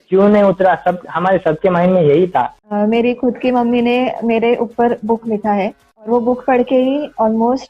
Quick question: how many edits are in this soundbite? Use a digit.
2